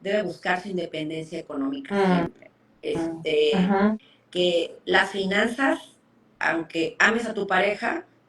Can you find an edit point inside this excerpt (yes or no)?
no